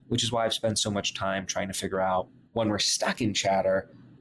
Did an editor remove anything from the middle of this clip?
yes; 1 cut; at 2.4 s

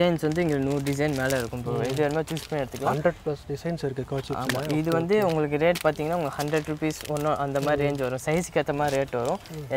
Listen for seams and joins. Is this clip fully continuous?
yes; 0 cuts

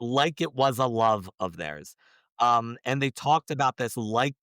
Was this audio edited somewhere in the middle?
no; 0 cuts

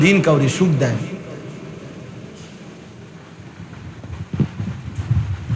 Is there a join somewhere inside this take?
no; 0 cuts

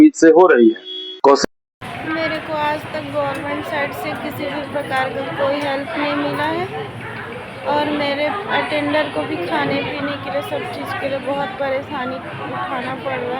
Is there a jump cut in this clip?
yes; 1 cut; at 1.4 s

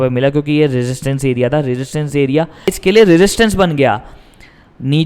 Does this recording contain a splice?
yes; 1 cut; at 2.8 s

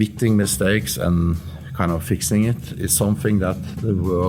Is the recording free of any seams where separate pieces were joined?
yes; 0 cuts

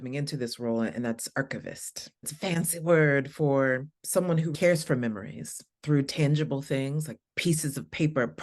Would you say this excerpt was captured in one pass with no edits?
no; 2 cuts; at 2.3 s, 4.5 s

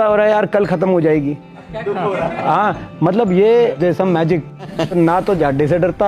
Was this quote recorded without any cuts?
no; 1 cut; at 4.7 s

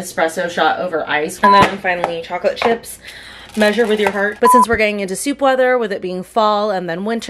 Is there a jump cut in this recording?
yes; 2 cuts; at 1.4 s, 4.4 s

